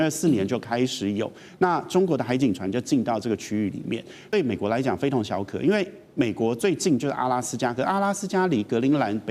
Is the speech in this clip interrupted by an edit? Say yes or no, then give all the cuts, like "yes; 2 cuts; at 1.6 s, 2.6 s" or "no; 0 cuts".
yes; 1 cut; at 4.3 s